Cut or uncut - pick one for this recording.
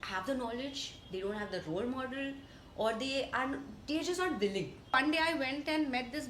cut